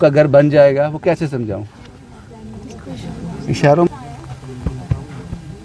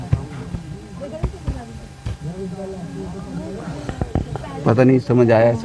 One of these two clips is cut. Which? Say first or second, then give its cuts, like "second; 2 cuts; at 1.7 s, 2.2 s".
first; 1 cut; at 3.9 s